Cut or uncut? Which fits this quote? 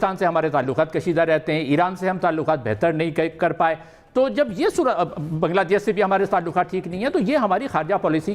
uncut